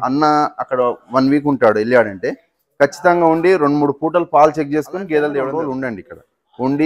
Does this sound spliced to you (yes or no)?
yes